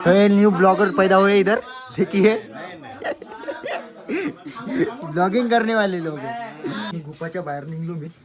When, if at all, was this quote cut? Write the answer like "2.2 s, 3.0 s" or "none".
6.9 s